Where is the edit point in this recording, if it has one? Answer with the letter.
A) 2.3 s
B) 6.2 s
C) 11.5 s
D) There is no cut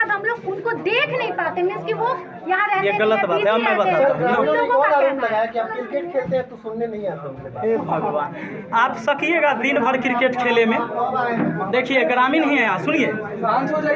D